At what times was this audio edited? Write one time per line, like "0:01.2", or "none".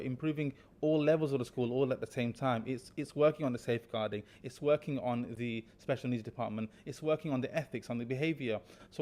none